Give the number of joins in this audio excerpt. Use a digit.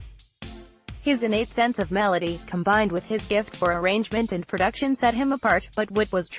1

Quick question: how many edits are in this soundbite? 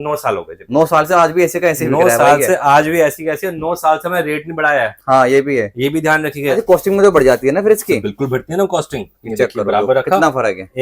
1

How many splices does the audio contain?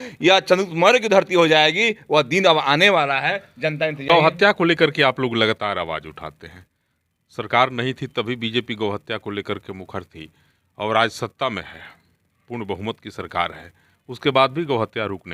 1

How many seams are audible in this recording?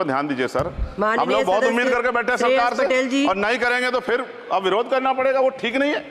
0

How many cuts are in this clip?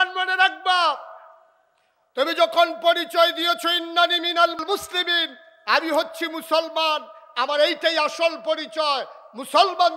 1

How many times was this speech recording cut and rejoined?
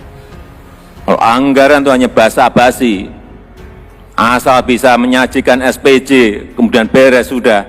1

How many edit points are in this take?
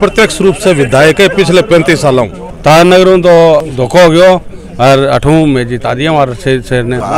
1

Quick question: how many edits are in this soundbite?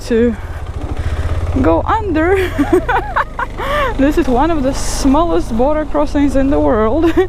1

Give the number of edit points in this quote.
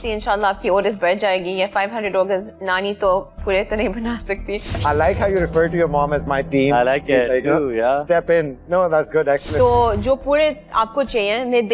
2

